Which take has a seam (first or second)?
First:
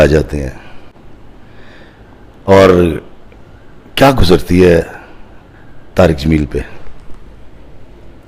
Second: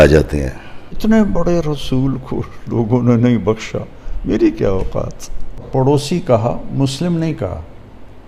second